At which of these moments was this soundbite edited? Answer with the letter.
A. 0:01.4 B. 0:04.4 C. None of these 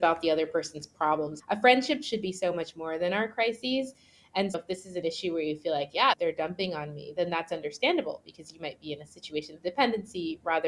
A